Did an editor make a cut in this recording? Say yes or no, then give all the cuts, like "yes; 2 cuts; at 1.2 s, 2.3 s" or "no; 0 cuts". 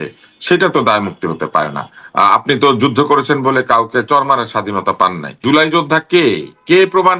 yes; 1 cut; at 5.4 s